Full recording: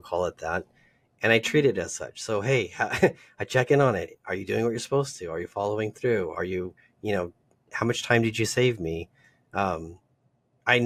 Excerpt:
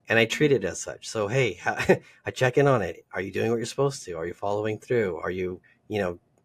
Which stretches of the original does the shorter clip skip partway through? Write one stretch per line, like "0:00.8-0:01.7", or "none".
none